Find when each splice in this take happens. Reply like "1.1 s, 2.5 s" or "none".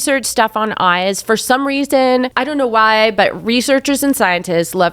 2.4 s